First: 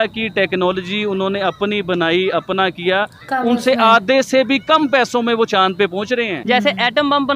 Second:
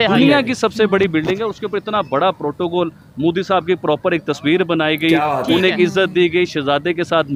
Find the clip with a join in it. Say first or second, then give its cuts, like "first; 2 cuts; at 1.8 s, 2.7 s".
first; 1 cut; at 6.4 s